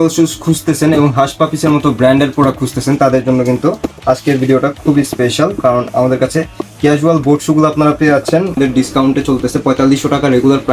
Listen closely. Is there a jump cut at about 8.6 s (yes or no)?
yes